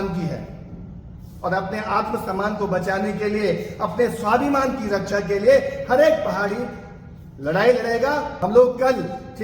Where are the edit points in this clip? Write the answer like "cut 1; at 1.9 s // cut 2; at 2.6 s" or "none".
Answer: cut 1; at 8.3 s